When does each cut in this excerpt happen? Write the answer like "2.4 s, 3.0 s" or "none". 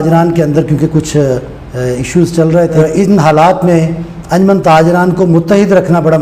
2.8 s